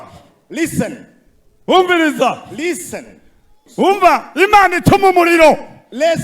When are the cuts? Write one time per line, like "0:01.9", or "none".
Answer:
0:03.6